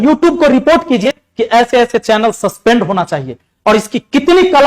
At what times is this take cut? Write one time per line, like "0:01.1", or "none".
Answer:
0:01.1